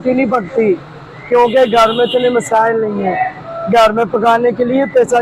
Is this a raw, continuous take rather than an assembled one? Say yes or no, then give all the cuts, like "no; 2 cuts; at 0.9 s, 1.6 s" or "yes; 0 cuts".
yes; 0 cuts